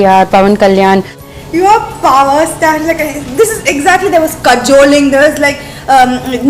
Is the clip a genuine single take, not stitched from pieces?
no; 1 cut; at 1.2 s

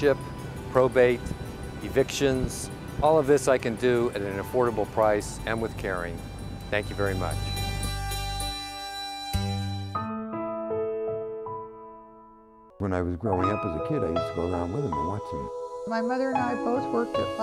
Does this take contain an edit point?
no; 0 cuts

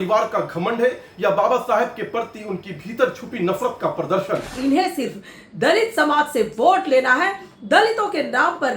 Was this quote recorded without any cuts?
no; 1 cut; at 4.5 s

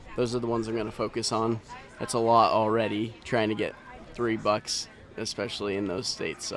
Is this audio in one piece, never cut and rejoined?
yes; 0 cuts

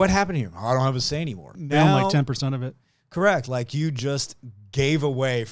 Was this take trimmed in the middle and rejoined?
yes; 1 cut; at 1.5 s

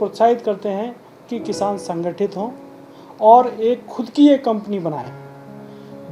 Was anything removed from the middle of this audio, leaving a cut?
no; 0 cuts

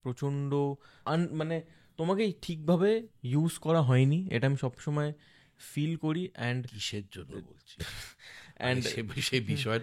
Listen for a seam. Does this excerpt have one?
no; 0 cuts

